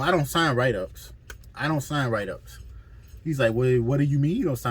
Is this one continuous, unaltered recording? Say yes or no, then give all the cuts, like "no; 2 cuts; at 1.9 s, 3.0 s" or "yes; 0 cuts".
yes; 0 cuts